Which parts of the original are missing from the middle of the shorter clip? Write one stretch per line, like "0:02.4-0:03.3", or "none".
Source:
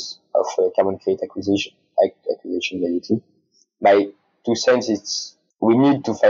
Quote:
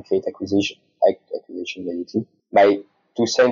0:03.3-0:03.7